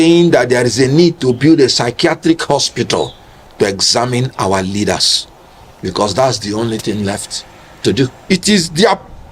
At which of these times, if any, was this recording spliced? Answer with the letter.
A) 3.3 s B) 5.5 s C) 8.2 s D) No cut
C